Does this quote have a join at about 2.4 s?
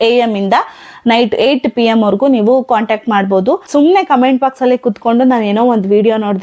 no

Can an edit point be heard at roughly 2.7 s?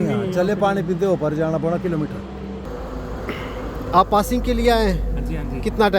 yes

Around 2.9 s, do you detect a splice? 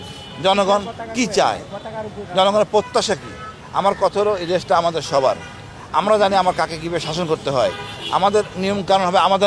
no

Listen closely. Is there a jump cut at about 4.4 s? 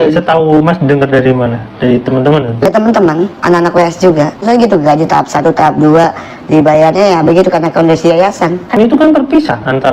yes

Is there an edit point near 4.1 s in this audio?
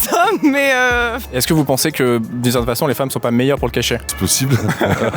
yes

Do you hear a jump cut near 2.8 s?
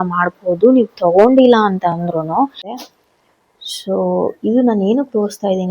yes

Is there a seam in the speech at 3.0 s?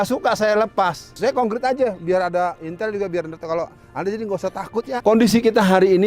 no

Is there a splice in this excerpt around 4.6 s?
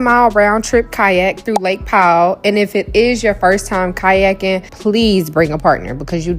no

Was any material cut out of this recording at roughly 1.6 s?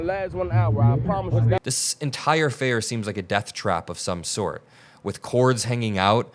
yes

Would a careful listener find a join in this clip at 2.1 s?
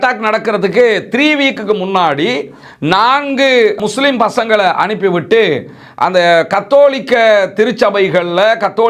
no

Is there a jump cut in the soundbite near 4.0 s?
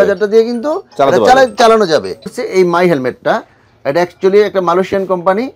no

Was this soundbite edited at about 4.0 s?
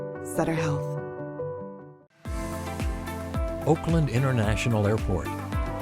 no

